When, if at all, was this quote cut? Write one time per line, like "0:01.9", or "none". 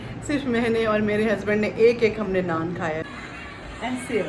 0:03.1